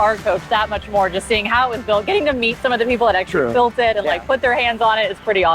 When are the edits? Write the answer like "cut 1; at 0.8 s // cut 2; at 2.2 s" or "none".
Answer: none